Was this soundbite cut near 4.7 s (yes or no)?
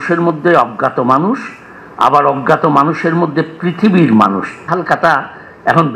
yes